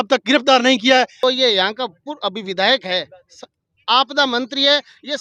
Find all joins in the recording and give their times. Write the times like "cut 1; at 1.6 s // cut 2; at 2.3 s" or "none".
cut 1; at 1.2 s